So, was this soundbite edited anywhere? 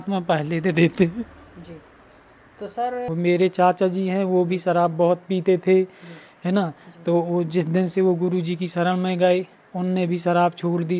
yes; 1 cut; at 3.1 s

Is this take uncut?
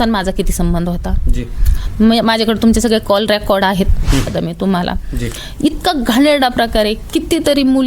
no; 1 cut; at 4.2 s

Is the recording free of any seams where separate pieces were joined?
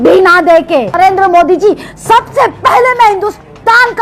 no; 1 cut; at 0.9 s

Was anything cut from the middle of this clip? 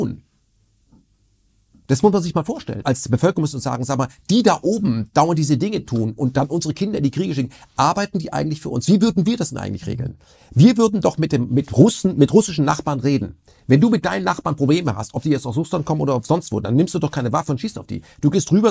yes; 1 cut; at 2.8 s

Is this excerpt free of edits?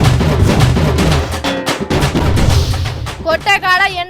no; 1 cut; at 2.8 s

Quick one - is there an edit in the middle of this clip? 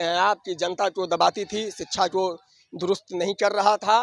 no; 0 cuts

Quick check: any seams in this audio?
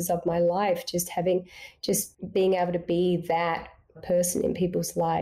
yes; 2 cuts; at 2.2 s, 4.0 s

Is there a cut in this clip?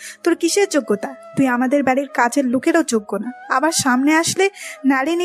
yes; 1 cut; at 1.1 s

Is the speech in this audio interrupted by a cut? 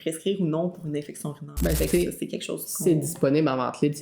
yes; 1 cut; at 1.8 s

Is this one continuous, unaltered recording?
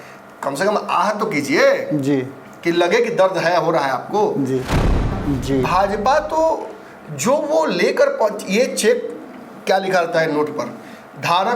no; 1 cut; at 4.8 s

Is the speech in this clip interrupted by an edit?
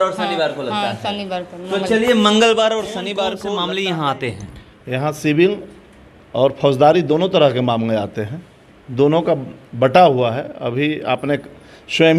yes; 1 cut; at 3.3 s

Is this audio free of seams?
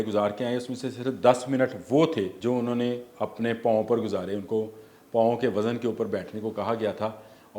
no; 1 cut; at 2.3 s

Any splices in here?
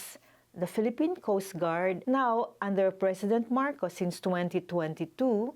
yes; 1 cut; at 2.0 s

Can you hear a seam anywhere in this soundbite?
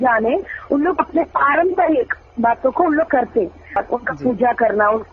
yes; 1 cut; at 3.8 s

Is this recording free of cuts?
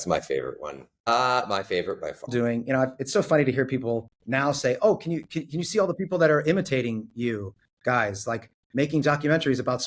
no; 3 cuts; at 1.1 s, 2.3 s, 4.2 s

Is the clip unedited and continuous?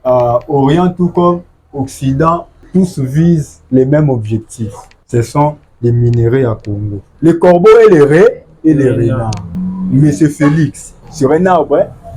no; 1 cut; at 7.1 s

